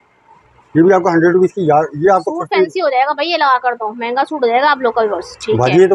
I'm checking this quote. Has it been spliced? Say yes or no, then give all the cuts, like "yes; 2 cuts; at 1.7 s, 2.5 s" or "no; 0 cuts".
no; 0 cuts